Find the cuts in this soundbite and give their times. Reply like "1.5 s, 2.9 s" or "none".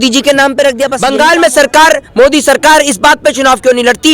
0.9 s